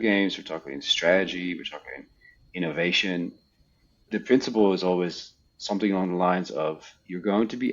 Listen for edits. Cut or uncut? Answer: cut